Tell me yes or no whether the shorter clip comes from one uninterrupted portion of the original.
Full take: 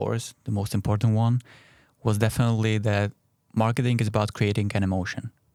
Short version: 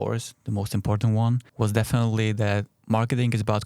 no